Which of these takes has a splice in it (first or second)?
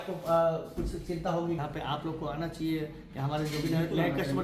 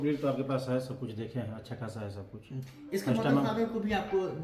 first